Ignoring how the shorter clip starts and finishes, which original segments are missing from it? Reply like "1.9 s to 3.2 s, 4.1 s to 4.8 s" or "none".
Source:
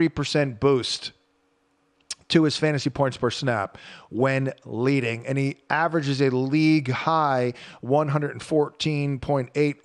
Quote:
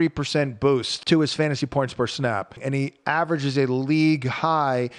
0.9 s to 2.2 s, 3.8 s to 5.2 s